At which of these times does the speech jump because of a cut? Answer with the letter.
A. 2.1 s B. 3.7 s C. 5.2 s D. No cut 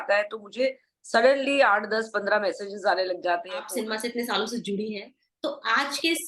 B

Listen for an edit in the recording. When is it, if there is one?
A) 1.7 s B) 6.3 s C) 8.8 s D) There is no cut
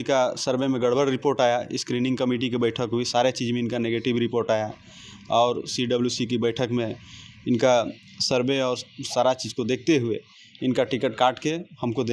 D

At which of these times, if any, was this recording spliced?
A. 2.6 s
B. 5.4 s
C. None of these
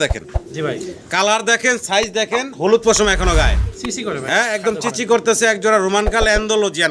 C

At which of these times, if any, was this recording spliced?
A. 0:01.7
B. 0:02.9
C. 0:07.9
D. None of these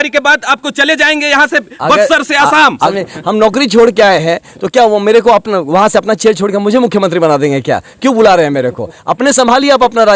B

